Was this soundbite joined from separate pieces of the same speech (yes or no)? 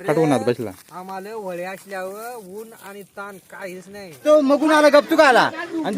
yes